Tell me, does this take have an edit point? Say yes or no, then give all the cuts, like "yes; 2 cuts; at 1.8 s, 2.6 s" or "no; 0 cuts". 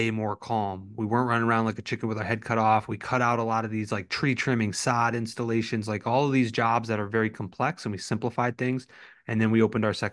no; 0 cuts